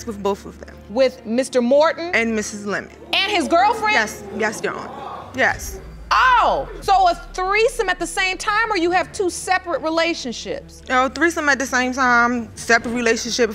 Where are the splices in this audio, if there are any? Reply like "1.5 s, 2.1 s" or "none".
none